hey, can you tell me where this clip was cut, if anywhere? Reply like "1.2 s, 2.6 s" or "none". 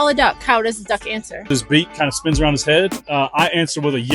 1.5 s, 3.0 s